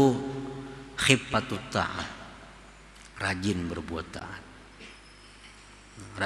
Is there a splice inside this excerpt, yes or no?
no